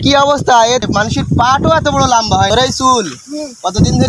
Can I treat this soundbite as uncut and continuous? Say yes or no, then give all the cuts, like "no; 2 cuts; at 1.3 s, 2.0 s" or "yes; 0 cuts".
no; 2 cuts; at 0.8 s, 2.5 s